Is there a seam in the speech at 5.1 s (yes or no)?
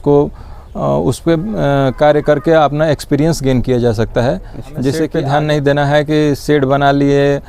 yes